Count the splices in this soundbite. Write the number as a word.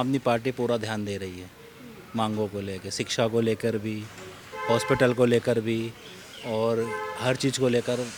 zero